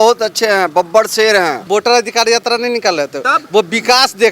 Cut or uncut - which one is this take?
cut